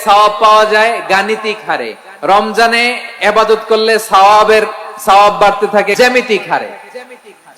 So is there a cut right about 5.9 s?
yes; 1 cut; at 5.9 s

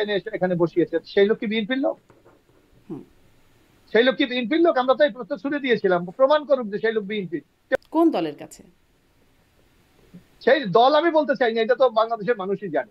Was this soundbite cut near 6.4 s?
no; 1 cut; at 7.8 s

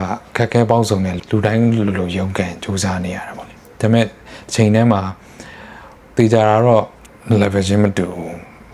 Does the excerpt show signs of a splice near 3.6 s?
no; 2 cuts; at 1.2 s, 7.0 s

